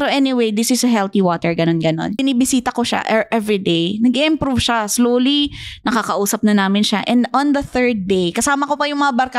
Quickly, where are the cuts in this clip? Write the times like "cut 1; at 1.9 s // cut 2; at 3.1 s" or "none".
cut 1; at 2.2 s